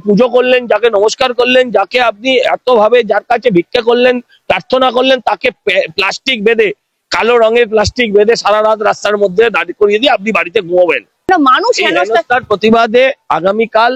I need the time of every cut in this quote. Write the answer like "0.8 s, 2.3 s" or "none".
11.2 s